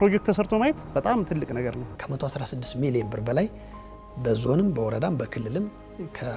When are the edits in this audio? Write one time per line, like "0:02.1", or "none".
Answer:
0:02.0